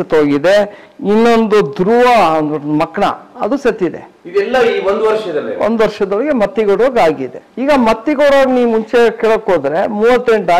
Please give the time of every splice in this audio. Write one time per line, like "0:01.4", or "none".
none

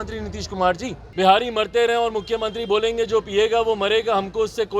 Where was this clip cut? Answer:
0:01.0

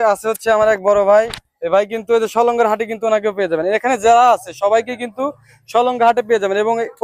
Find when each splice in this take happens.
none

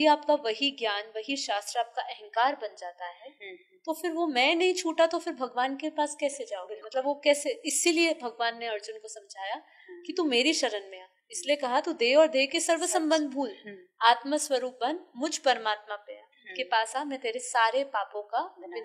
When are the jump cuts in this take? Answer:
none

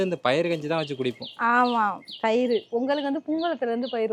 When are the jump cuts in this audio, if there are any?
none

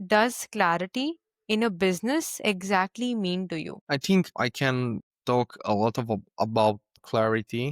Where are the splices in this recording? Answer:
none

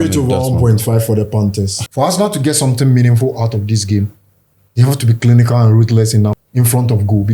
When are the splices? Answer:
0:01.8
0:06.4

